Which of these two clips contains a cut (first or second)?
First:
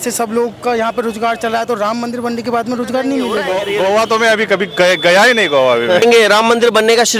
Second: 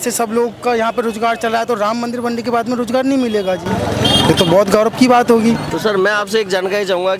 first